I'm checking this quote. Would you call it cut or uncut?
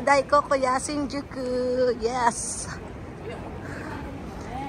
uncut